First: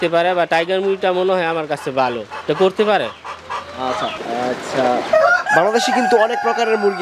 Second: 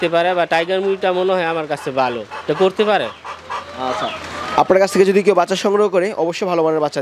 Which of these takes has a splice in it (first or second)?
first